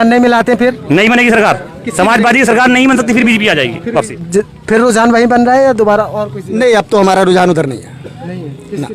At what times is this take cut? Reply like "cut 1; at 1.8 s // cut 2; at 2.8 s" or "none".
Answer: cut 1; at 4.2 s